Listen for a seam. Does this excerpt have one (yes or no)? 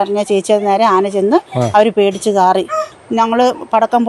yes